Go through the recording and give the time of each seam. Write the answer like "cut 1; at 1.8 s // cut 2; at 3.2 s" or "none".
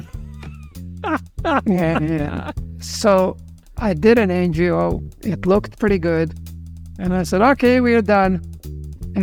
none

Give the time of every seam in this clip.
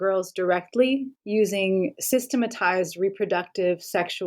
cut 1; at 1.1 s

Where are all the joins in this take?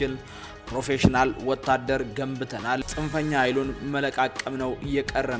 cut 1; at 2.8 s

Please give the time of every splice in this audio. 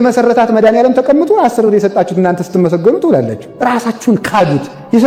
none

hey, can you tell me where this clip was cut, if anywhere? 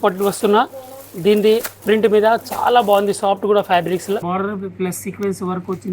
cut 1; at 1.7 s // cut 2; at 4.2 s

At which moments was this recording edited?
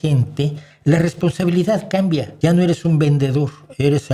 cut 1; at 2.3 s

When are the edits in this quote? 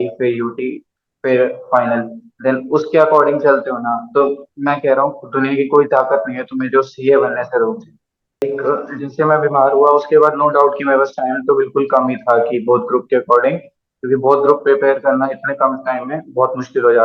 cut 1; at 8.4 s

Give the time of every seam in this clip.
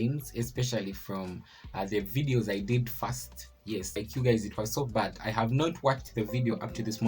cut 1; at 4.0 s

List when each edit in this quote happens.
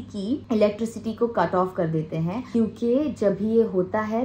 cut 1; at 2.5 s

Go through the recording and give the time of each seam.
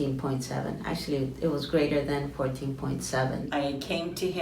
cut 1; at 3.5 s

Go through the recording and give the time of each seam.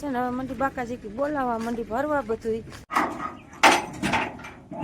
cut 1; at 2.8 s

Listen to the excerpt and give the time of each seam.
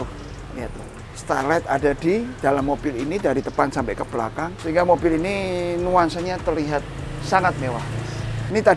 none

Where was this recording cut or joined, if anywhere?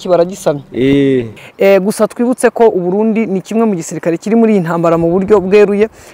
cut 1; at 1.4 s

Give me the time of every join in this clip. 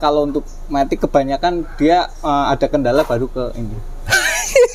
none

